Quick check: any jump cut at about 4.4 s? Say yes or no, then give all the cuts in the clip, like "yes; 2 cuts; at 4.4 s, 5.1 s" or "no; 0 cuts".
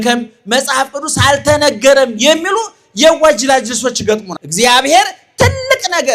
yes; 1 cut; at 4.4 s